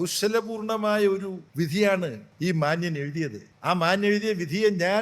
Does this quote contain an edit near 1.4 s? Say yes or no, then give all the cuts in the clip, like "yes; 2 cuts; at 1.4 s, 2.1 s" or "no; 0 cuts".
yes; 3 cuts; at 1.4 s, 2.2 s, 3.5 s